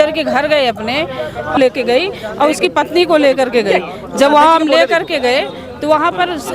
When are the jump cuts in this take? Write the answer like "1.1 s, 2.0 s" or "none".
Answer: 1.6 s